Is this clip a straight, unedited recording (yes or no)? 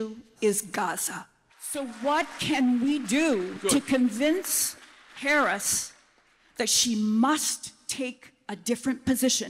yes